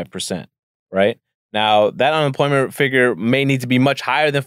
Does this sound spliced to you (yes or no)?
no